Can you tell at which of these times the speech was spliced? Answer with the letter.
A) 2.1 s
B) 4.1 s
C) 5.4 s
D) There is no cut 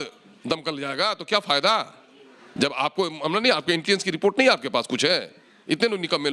D